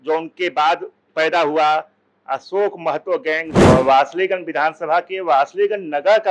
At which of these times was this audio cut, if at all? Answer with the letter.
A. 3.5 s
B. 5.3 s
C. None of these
A